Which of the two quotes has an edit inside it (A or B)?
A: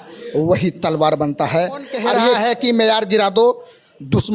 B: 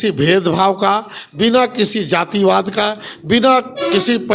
A